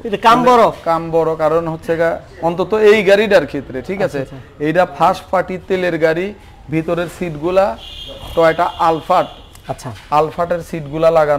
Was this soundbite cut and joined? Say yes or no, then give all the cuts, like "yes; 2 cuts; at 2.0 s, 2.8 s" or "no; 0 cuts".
no; 0 cuts